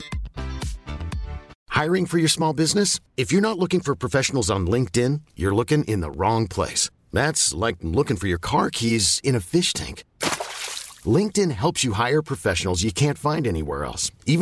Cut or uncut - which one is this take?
cut